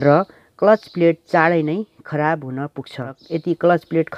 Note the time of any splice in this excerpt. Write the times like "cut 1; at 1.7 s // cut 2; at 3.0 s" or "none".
cut 1; at 3.2 s

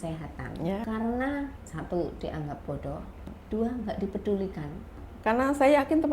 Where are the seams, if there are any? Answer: cut 1; at 0.8 s // cut 2; at 1.7 s // cut 3; at 3.3 s // cut 4; at 5.0 s

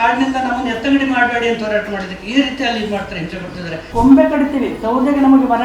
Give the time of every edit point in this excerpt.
cut 1; at 3.8 s

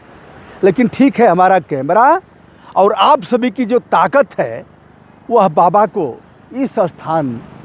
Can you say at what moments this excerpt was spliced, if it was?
none

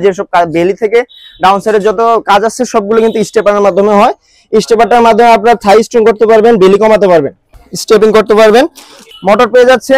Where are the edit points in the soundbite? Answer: cut 1; at 9.0 s

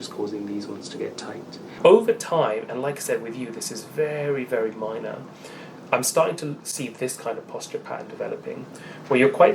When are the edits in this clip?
cut 1; at 1.8 s

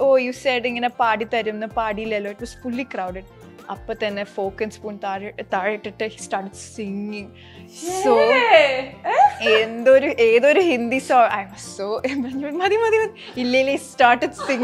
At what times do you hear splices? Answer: none

